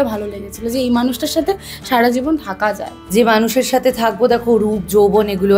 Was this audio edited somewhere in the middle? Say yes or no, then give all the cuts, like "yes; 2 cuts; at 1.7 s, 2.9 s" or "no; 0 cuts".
yes; 1 cut; at 2.9 s